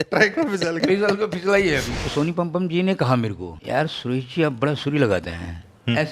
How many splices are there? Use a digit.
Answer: 2